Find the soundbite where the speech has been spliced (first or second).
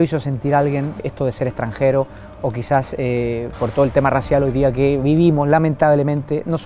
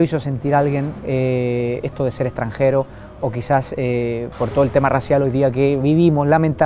first